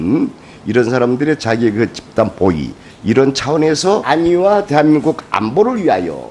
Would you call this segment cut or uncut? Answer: uncut